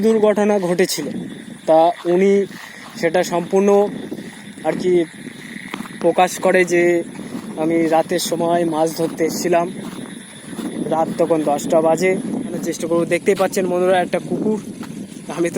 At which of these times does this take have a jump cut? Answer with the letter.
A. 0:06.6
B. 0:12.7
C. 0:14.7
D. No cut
B